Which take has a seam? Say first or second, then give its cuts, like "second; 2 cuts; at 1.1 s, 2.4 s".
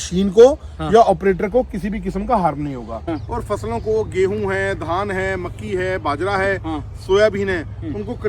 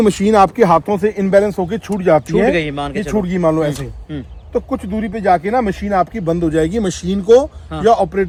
first; 1 cut; at 3.0 s